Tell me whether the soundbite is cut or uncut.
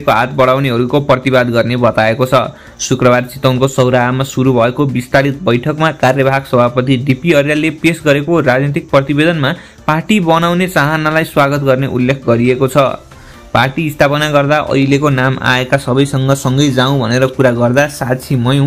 uncut